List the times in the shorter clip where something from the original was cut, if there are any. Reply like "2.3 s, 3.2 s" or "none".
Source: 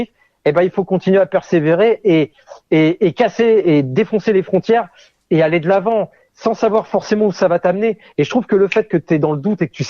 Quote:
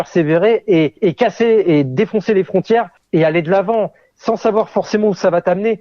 1.0 s, 3.0 s